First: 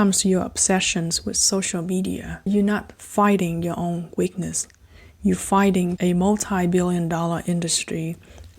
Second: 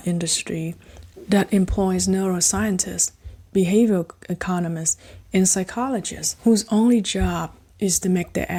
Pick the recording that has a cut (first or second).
first